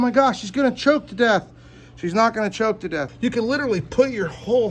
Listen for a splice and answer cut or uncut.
cut